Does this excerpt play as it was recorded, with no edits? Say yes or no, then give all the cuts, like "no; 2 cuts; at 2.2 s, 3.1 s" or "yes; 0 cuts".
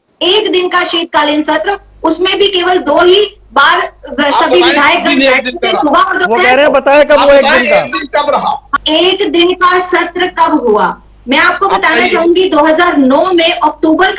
yes; 0 cuts